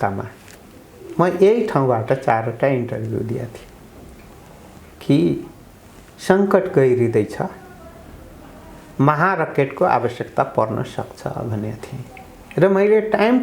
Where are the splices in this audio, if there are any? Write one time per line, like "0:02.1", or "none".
none